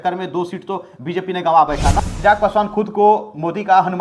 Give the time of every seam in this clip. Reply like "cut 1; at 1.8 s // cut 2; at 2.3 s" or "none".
cut 1; at 2.0 s